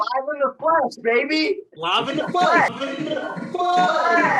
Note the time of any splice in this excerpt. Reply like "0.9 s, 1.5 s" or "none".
none